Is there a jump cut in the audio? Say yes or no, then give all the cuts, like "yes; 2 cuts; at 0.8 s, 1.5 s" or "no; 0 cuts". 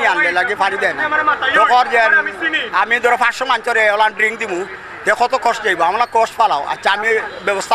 no; 0 cuts